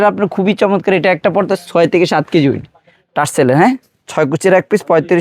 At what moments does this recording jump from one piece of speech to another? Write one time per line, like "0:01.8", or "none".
none